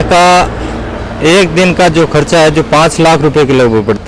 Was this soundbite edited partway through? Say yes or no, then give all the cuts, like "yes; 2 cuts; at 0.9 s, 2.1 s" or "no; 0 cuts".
no; 0 cuts